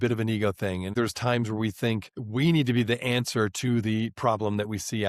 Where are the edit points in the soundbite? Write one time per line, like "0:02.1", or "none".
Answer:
0:00.9